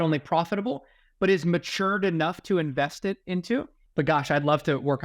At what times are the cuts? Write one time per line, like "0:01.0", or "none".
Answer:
0:03.8